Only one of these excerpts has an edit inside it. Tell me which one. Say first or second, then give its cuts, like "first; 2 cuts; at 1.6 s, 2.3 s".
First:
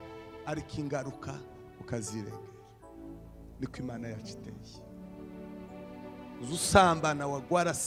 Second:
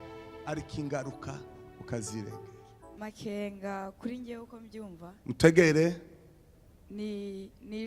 second; 1 cut; at 3.0 s